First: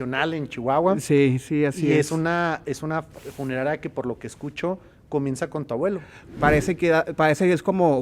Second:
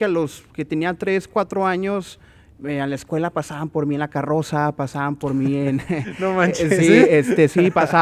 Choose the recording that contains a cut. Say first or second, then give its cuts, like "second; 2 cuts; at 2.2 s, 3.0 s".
first; 1 cut; at 6.1 s